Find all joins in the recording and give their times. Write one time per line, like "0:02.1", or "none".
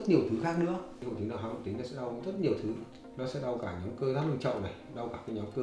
0:01.0

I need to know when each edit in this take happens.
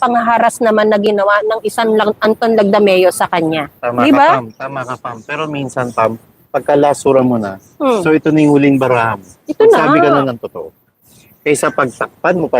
none

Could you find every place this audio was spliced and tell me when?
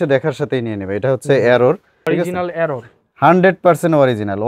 0:01.9

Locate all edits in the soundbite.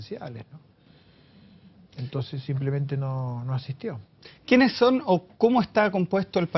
0:02.3

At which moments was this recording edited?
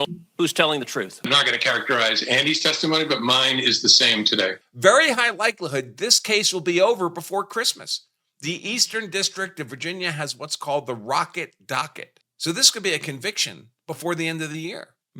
0:01.3
0:04.7

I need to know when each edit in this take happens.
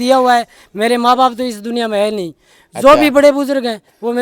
none

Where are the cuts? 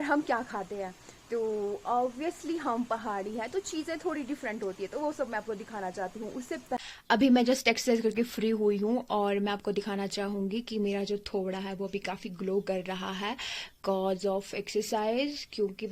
0:06.8

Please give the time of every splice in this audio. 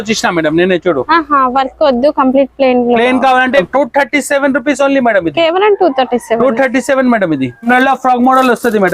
0:03.6
0:07.7

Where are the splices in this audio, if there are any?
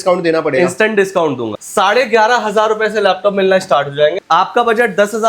0:01.5
0:04.2

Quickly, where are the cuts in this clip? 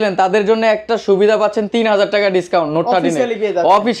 none

